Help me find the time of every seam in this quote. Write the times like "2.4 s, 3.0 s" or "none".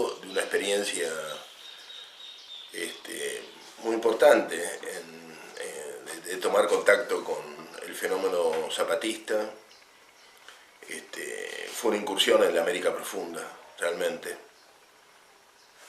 5.8 s